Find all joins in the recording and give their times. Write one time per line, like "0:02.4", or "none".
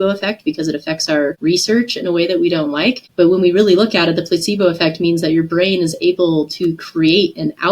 0:01.4
0:03.0